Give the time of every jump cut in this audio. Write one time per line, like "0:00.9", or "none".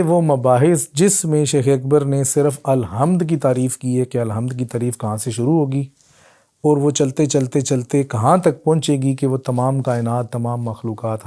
none